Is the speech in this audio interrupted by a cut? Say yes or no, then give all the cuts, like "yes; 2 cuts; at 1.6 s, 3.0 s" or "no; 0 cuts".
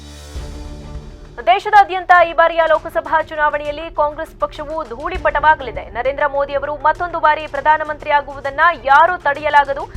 yes; 1 cut; at 1.0 s